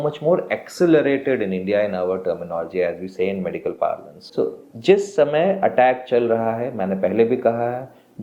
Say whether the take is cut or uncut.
cut